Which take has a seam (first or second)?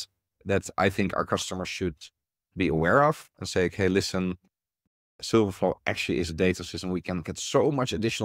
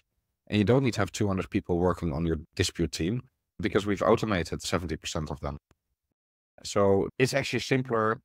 second